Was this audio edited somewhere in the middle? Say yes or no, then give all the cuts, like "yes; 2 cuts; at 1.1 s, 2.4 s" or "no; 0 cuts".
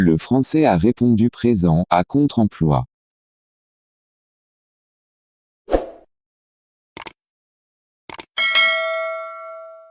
no; 0 cuts